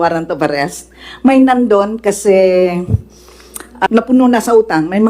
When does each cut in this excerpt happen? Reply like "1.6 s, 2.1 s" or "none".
3.9 s

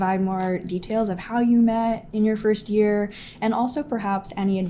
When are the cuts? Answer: none

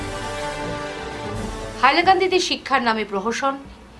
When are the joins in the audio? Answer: 1.0 s

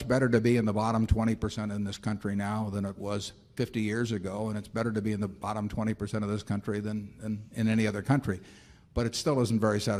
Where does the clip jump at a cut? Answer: none

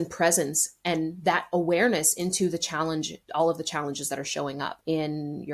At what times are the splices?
3.2 s, 4.8 s

